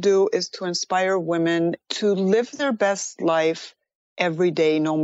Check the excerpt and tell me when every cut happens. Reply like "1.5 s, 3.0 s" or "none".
1.8 s, 2.5 s